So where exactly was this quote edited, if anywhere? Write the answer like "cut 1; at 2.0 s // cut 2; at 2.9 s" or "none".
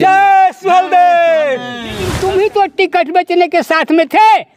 cut 1; at 2.1 s